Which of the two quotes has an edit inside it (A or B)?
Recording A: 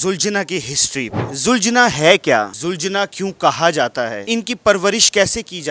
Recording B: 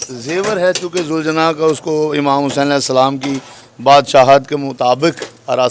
A